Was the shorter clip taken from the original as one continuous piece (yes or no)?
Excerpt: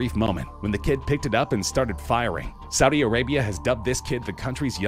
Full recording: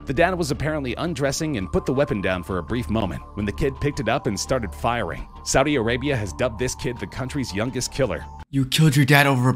yes